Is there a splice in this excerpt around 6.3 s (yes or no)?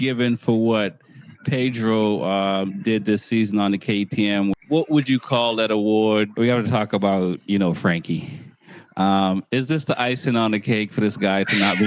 yes